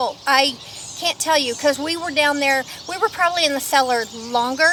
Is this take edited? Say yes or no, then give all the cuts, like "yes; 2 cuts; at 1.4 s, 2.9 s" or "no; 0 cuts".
no; 0 cuts